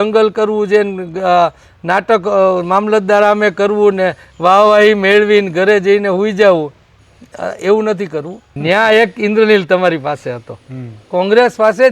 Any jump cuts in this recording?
yes; 1 cut; at 8.4 s

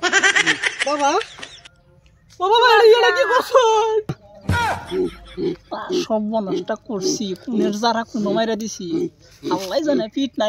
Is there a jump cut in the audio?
yes; 1 cut; at 4.6 s

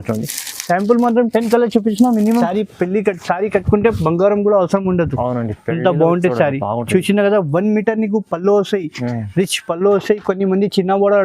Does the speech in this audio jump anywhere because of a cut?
yes; 1 cut; at 2.5 s

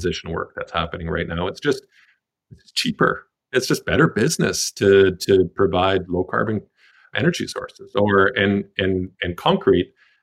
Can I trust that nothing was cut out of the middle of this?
yes; 0 cuts

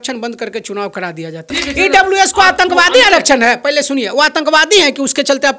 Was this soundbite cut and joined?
yes; 1 cut; at 1.5 s

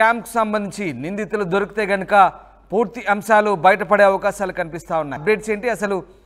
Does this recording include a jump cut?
yes; 1 cut; at 5.2 s

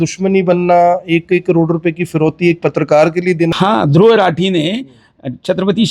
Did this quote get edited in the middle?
yes; 1 cut; at 3.5 s

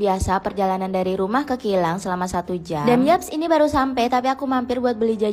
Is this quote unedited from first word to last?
yes; 0 cuts

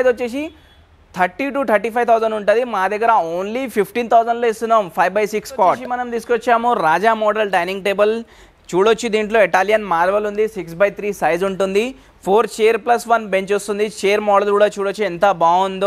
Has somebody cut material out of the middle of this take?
yes; 1 cut; at 5.9 s

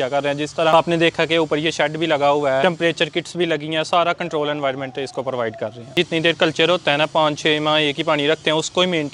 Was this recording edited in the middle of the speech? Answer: yes; 3 cuts; at 0.7 s, 2.6 s, 5.9 s

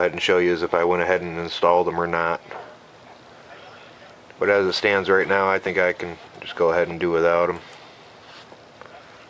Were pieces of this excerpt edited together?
no; 0 cuts

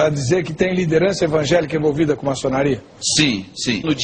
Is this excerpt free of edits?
yes; 0 cuts

